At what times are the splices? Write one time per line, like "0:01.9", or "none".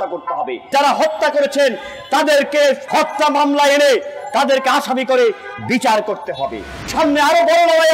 0:00.7
0:06.9